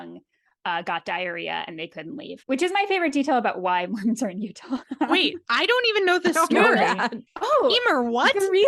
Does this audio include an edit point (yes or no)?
no